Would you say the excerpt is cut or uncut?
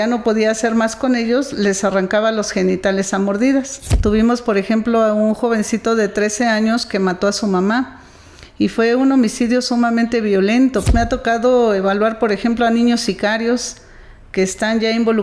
cut